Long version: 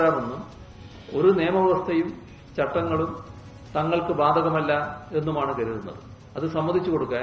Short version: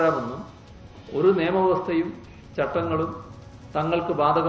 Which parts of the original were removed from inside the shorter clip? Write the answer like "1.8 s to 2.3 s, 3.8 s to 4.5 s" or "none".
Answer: none